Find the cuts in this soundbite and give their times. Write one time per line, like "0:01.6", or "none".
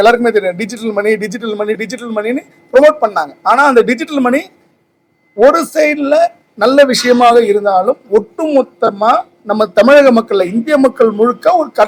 none